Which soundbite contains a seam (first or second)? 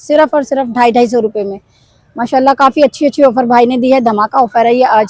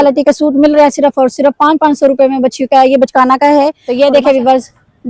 second